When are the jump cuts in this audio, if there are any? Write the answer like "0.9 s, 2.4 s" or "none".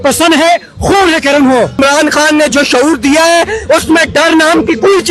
1.8 s